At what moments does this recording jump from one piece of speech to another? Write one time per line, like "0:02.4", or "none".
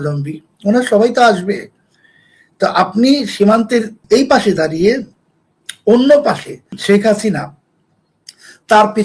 0:03.9
0:06.8